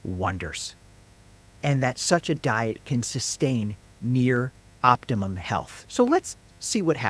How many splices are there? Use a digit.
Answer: 1